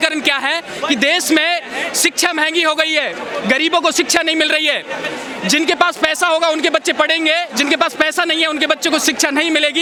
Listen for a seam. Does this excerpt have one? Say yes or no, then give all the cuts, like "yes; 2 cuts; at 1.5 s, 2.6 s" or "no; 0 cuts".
no; 0 cuts